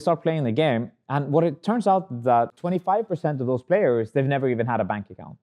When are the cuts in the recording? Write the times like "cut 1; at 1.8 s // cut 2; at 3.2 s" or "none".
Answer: cut 1; at 2.6 s

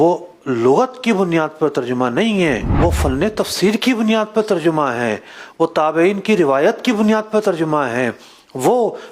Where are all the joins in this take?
cut 1; at 2.7 s

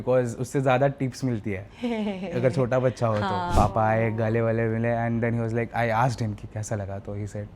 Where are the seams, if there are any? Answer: cut 1; at 3.5 s

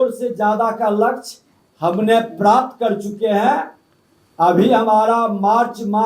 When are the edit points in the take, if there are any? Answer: none

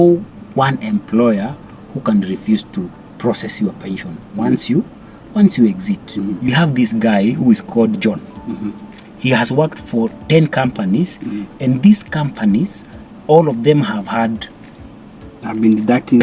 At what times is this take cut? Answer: cut 1; at 6.5 s

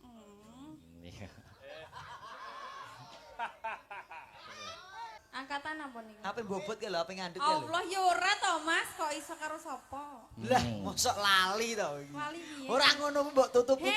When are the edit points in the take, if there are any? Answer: cut 1; at 5.2 s

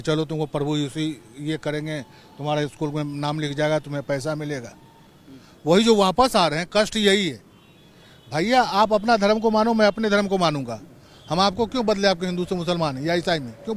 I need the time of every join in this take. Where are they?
none

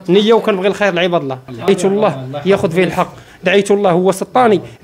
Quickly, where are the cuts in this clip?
cut 1; at 1.7 s

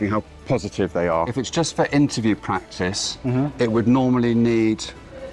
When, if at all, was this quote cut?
cut 1; at 1.3 s

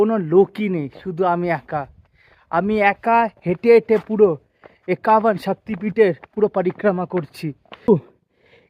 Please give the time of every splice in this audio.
cut 1; at 7.8 s

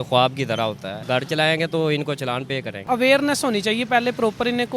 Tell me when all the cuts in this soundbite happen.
cut 1; at 1.0 s // cut 2; at 2.9 s

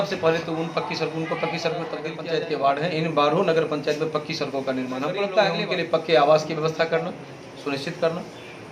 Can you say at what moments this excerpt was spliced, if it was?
cut 1; at 2.1 s // cut 2; at 5.7 s

